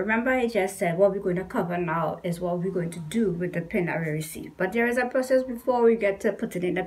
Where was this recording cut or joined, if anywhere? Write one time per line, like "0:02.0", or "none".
none